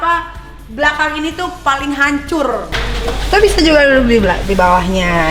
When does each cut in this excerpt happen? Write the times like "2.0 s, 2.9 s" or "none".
2.8 s

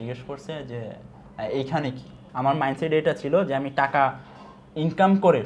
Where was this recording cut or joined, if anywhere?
2.2 s

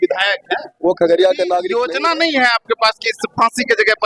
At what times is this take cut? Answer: 1.8 s

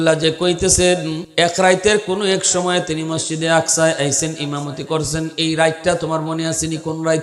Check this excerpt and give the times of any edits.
1.2 s

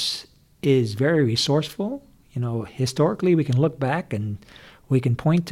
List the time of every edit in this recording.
none

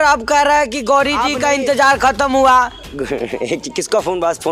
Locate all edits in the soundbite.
none

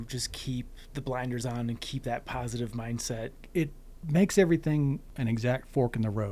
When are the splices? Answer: 3.4 s, 5.1 s

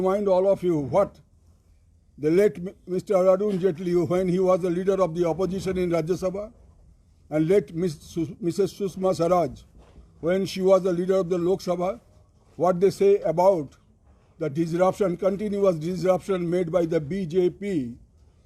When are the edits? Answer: none

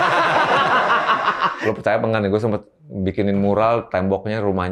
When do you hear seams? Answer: 1.6 s

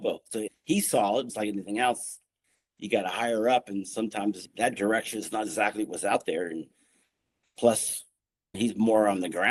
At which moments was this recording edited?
none

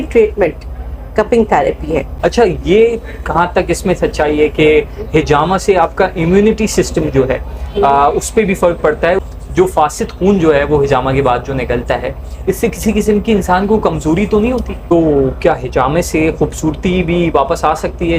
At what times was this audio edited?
2.1 s, 9.2 s, 14.9 s

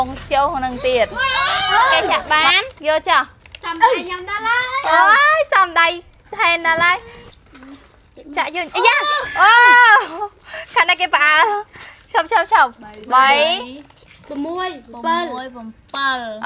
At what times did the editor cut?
2.0 s, 7.2 s

